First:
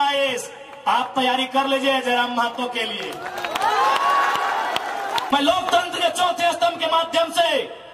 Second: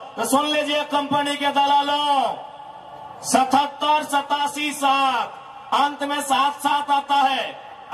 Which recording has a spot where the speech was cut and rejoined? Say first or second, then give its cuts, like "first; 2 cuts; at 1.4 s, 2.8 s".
first; 1 cut; at 5.3 s